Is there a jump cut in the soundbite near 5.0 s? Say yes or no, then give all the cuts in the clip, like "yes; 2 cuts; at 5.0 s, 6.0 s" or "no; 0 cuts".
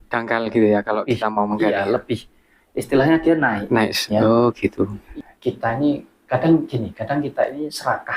yes; 1 cut; at 5.0 s